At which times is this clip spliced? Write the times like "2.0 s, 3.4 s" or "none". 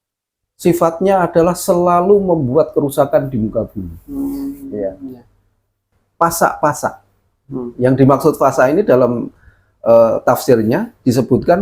5.9 s